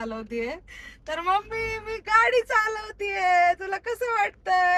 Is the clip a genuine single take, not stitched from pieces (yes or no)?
yes